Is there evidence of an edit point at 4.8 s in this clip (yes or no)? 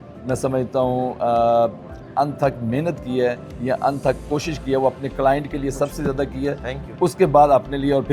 no